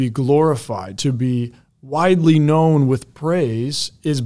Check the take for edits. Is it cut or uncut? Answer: uncut